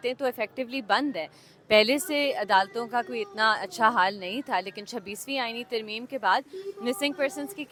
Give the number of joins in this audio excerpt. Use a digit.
0